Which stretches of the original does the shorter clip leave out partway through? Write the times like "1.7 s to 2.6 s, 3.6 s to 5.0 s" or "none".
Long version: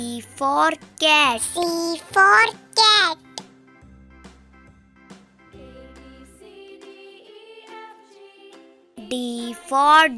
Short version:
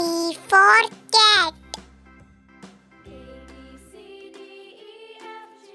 3.4 s to 4.2 s